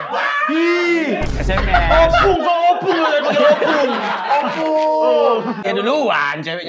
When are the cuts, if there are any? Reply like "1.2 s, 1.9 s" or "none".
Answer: 1.3 s, 5.7 s